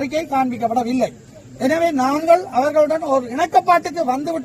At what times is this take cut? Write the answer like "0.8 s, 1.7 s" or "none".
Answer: none

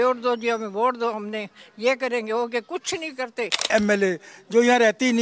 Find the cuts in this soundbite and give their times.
3.7 s

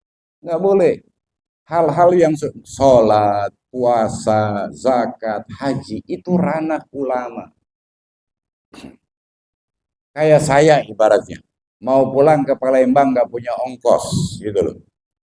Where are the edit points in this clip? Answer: 8.5 s

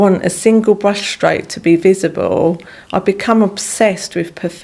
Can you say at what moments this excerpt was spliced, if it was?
none

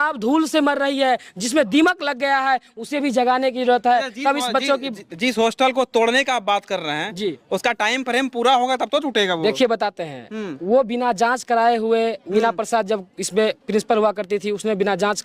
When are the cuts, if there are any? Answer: none

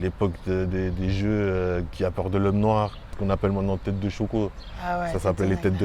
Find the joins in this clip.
3.1 s

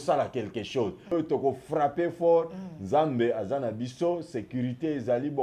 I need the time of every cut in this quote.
1.1 s

